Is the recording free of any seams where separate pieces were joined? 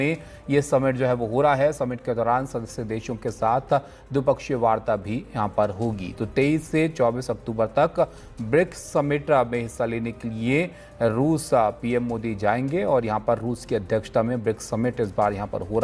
yes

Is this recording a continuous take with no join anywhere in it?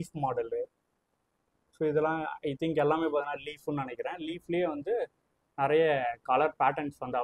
yes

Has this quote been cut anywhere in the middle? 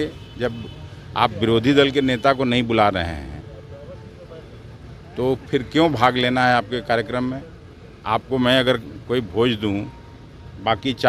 no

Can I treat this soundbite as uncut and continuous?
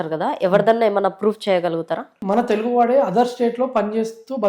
no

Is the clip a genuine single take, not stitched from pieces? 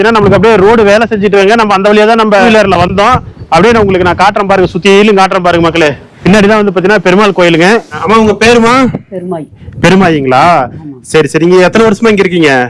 no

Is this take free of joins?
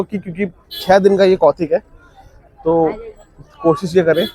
yes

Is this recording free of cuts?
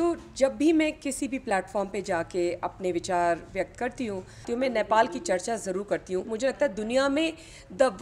no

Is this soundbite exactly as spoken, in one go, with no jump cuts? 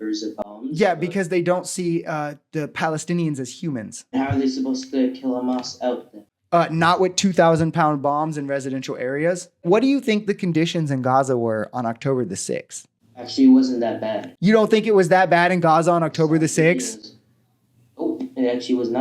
no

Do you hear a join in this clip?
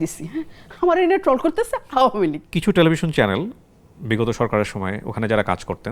yes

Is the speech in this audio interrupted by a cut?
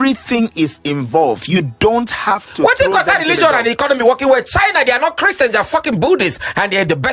no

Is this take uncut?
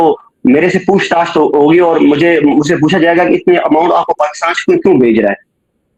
yes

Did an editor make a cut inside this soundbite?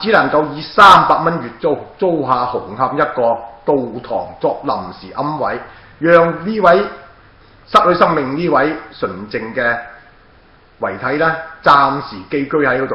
no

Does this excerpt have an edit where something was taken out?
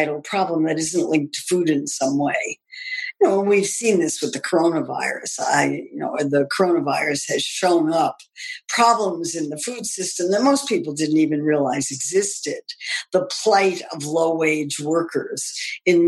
no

